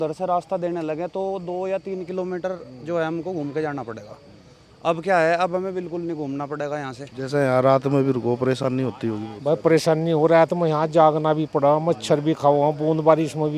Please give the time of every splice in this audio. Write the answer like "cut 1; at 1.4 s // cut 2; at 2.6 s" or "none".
cut 1; at 7.0 s